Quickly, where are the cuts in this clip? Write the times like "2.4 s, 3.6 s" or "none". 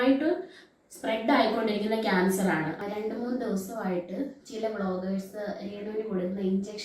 2.8 s